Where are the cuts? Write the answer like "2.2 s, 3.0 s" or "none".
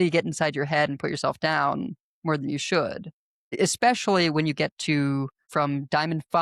3.5 s, 5.4 s

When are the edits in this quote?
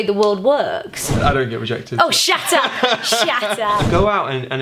1.2 s, 3.9 s

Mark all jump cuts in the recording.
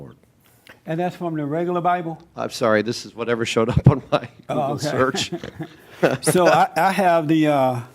6.4 s

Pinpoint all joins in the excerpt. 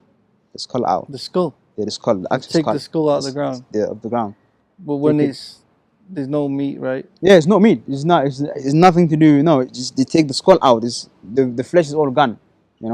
none

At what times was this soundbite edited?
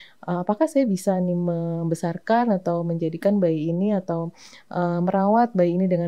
none

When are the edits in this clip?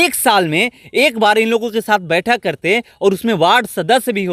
none

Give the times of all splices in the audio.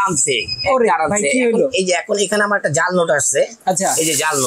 none

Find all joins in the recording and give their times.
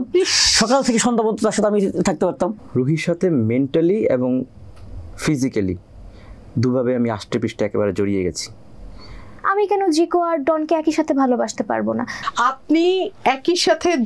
2.6 s, 9.4 s, 12.2 s

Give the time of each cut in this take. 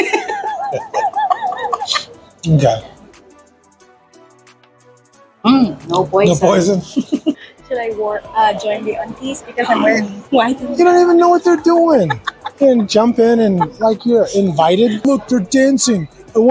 7.4 s, 15.0 s

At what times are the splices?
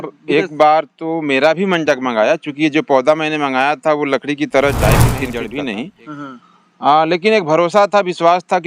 5.3 s

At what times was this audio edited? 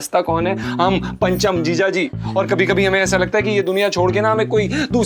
none

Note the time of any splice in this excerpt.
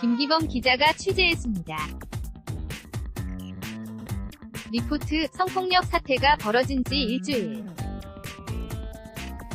1.9 s, 4.6 s, 7.8 s

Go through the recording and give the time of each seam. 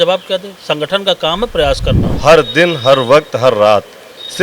2.1 s

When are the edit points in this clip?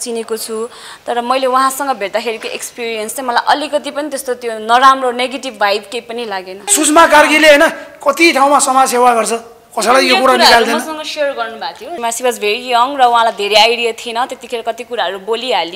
6.6 s, 11.9 s

